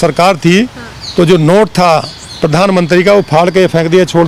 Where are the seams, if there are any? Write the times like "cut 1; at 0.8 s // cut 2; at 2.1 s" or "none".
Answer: none